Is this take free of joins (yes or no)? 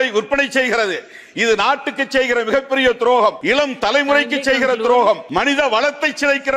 no